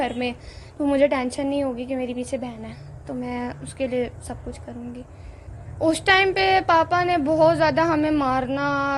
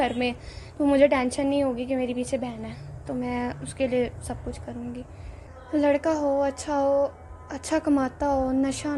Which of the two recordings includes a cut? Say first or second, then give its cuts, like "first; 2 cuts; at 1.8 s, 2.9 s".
first; 1 cut; at 5.5 s